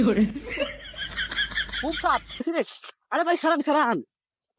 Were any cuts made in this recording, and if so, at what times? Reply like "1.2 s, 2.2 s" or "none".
2.4 s